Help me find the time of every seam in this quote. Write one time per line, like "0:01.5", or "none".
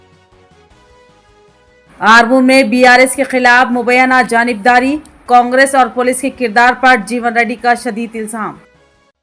0:01.4